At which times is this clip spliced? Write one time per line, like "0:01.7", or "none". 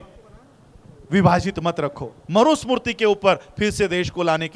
0:02.2